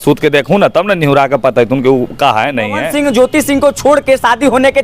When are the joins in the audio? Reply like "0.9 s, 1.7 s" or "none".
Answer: 2.8 s